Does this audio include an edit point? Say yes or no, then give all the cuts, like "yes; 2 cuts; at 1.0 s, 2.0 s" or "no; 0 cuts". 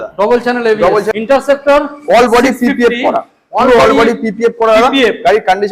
yes; 1 cut; at 1.1 s